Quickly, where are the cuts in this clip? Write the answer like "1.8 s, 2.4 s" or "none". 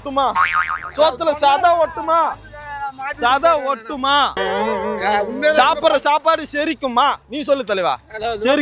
none